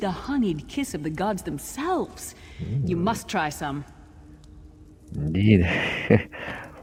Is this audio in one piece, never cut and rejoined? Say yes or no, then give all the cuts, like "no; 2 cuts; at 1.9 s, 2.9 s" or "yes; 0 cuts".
yes; 0 cuts